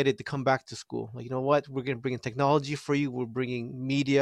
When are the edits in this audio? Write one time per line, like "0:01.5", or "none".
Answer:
none